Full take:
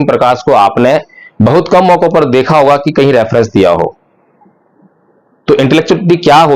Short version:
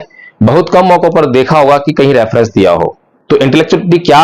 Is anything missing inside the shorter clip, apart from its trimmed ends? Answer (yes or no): yes